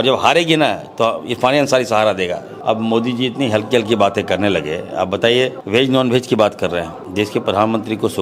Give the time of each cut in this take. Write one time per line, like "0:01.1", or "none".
0:02.5
0:05.6
0:07.0